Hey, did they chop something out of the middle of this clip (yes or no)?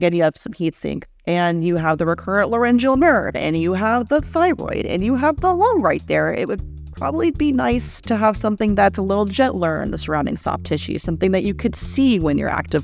no